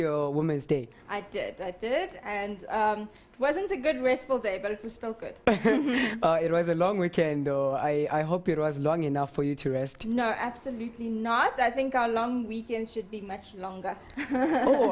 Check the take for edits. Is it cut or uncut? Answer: uncut